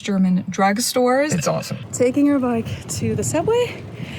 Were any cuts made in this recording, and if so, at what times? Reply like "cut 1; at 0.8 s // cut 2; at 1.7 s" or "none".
cut 1; at 1.6 s